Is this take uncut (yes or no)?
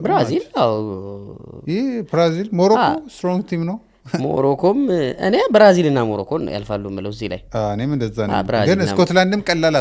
yes